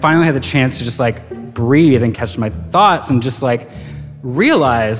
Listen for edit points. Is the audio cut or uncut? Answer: cut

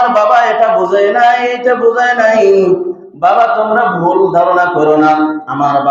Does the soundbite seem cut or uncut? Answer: uncut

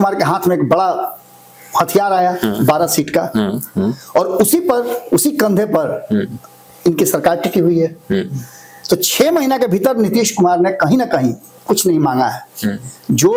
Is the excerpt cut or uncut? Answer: uncut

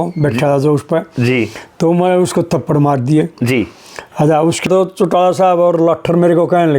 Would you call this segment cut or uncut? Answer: cut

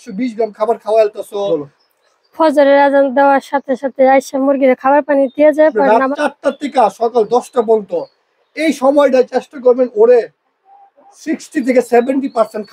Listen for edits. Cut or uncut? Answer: cut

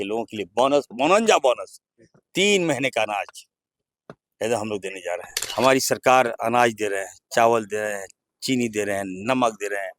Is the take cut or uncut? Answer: cut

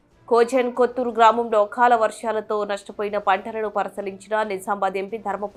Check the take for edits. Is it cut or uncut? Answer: uncut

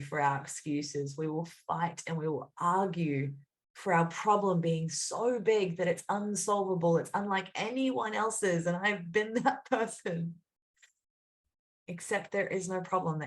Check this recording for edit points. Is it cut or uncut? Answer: uncut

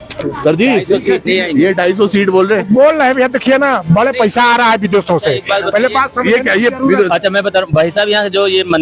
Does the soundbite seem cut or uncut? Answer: uncut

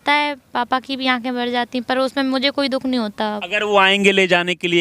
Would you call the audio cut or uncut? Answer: cut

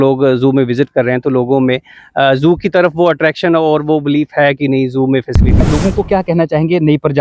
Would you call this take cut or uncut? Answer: cut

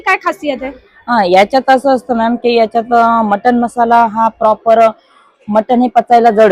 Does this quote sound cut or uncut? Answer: uncut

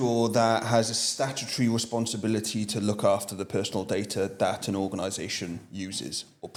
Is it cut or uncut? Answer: uncut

